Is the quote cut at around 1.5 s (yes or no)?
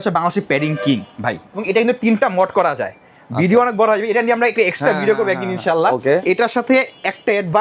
yes